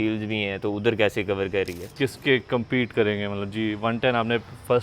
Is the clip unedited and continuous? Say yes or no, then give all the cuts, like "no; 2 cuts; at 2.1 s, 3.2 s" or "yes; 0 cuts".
no; 1 cut; at 1.9 s